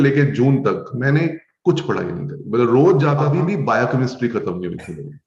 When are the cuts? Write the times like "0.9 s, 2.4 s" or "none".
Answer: 3.3 s